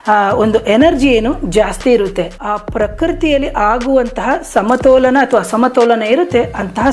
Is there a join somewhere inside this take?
yes; 1 cut; at 2.3 s

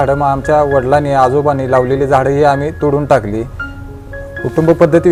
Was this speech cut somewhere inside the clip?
no; 0 cuts

